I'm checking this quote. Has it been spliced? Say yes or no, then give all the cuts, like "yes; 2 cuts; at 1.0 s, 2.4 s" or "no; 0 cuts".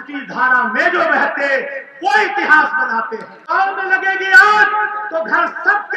yes; 1 cut; at 3.3 s